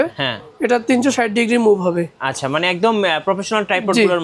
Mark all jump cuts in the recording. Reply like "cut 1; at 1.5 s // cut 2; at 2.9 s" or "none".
none